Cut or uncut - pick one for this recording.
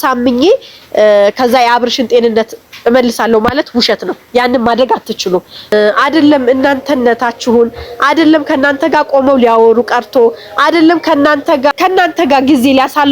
cut